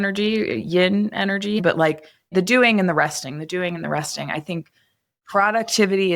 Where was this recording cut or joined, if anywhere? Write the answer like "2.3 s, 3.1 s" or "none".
1.6 s, 5.2 s